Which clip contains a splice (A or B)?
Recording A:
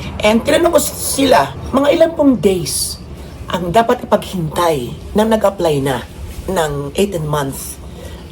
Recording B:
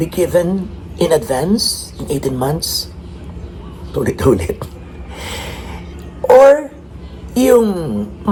A